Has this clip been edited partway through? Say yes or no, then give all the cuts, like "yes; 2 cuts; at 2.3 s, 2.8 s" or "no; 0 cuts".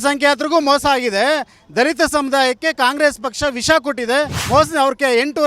yes; 1 cut; at 4.4 s